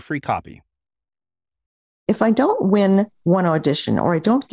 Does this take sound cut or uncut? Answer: cut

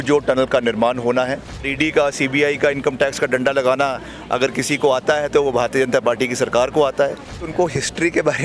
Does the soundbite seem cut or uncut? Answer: cut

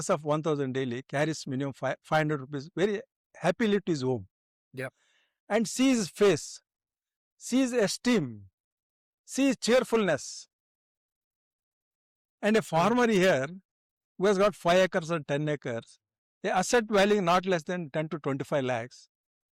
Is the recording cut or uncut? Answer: uncut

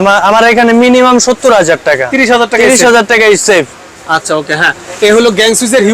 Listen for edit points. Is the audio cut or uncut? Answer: uncut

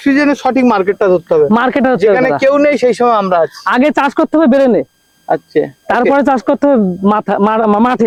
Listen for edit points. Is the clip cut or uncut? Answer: uncut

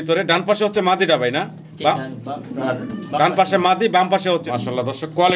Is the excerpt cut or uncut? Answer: cut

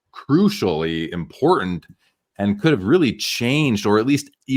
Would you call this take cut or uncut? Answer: uncut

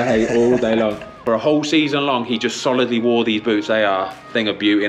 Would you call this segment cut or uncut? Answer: cut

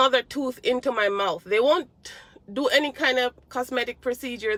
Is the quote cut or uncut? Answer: uncut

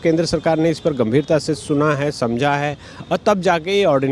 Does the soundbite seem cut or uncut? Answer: uncut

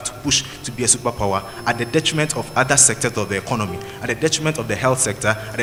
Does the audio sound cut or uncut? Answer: uncut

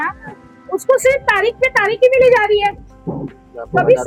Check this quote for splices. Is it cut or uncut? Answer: uncut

